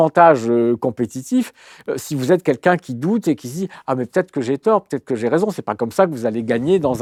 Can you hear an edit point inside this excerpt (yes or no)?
no